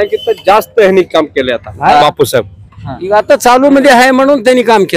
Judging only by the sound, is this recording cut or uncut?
uncut